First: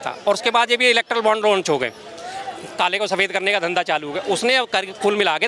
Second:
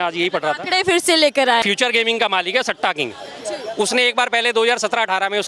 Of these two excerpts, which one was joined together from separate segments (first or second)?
second